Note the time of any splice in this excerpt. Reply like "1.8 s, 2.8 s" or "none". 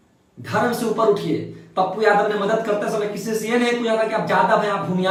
none